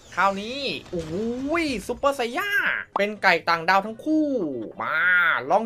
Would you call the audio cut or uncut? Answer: cut